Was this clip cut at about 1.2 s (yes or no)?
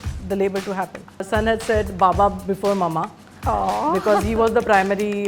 yes